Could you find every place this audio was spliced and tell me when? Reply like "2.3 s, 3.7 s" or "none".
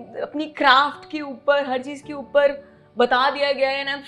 none

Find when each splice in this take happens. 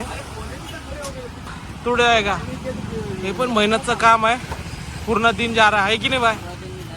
1.5 s

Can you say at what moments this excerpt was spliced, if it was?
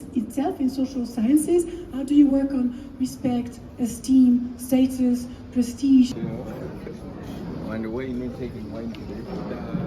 6.2 s

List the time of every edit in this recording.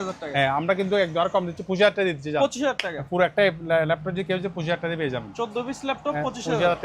none

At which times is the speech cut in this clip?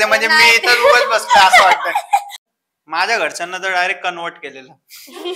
2.4 s

